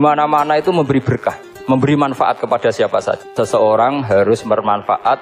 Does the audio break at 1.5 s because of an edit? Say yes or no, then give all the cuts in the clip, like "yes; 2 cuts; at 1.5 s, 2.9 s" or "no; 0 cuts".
yes; 2 cuts; at 1.5 s, 3.3 s